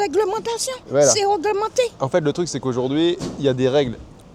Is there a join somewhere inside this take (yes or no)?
no